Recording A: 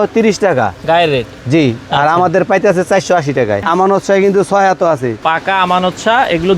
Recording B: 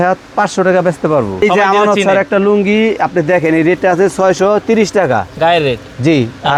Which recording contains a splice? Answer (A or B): A